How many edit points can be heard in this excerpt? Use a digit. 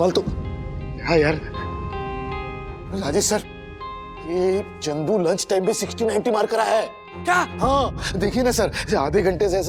0